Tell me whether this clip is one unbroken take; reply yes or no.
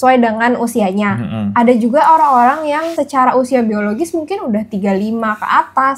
no